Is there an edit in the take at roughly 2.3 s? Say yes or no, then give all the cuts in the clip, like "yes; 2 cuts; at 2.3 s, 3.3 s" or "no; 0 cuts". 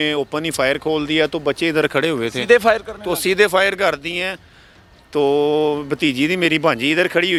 no; 0 cuts